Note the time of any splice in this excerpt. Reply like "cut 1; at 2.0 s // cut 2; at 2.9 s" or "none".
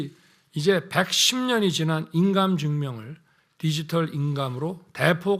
none